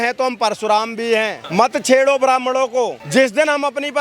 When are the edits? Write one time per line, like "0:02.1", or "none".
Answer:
0:01.4
0:03.0